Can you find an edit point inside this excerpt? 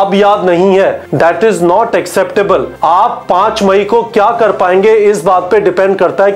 yes; 2 cuts; at 1.0 s, 2.7 s

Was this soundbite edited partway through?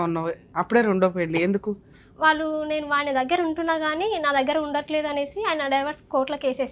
yes; 1 cut; at 1.9 s

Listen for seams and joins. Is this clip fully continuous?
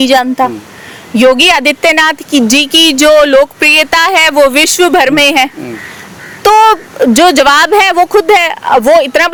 yes; 0 cuts

